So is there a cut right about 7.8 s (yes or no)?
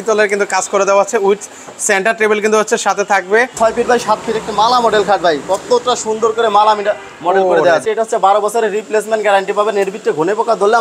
yes